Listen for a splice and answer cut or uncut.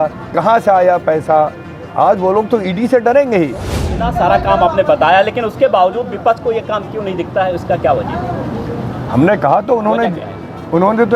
cut